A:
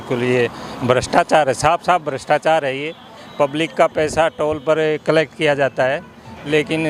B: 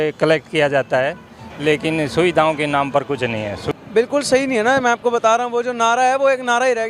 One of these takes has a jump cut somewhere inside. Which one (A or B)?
B